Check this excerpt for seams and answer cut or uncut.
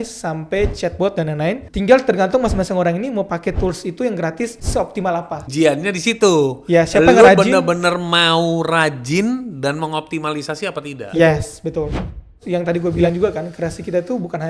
cut